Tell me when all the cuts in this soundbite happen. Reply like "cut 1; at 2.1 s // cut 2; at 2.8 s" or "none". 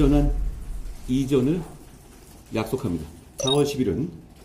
cut 1; at 3.2 s